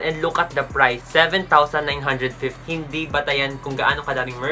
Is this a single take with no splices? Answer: no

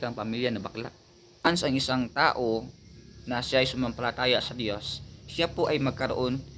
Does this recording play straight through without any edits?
no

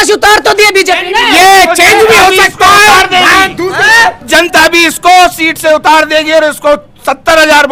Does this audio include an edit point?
no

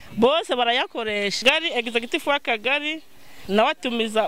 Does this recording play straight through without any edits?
no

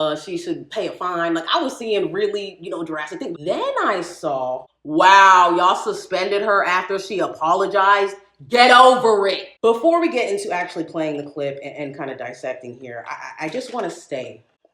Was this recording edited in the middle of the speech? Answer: yes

